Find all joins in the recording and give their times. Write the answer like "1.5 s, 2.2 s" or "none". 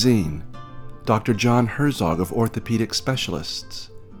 none